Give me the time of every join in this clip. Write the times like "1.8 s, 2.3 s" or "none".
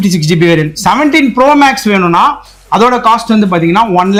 none